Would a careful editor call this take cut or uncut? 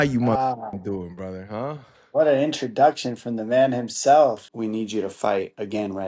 cut